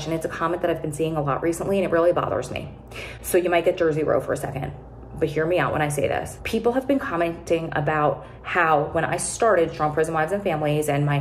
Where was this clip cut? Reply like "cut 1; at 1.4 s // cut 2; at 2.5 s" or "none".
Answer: none